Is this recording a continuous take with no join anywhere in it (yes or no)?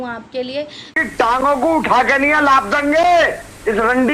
no